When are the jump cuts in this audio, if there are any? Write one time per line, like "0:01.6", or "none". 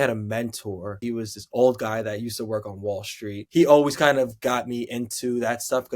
0:00.9
0:03.4